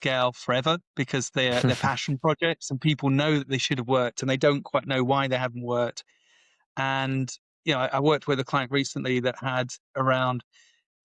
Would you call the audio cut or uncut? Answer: uncut